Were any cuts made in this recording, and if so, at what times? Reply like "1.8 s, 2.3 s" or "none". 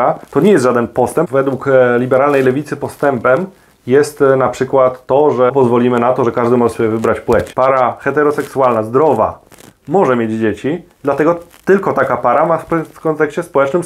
1.3 s, 5.5 s, 7.5 s